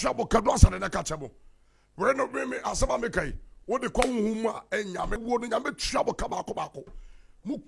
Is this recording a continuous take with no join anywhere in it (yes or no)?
no